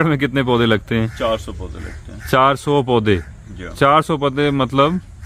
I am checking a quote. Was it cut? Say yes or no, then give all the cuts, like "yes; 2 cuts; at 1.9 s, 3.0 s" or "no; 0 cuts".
no; 0 cuts